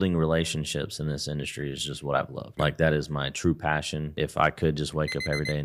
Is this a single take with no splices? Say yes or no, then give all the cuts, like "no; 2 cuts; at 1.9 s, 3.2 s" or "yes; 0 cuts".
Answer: no; 2 cuts; at 2.4 s, 4.1 s